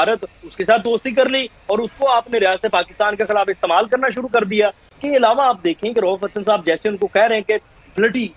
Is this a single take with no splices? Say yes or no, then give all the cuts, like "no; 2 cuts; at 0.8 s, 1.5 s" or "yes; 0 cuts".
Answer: yes; 0 cuts